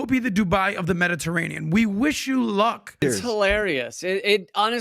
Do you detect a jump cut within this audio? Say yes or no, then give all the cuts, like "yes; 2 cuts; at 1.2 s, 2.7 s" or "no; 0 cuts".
yes; 1 cut; at 3.0 s